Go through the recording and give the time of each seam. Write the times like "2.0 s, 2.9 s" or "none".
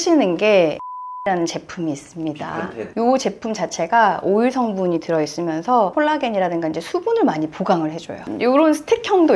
1.0 s, 8.1 s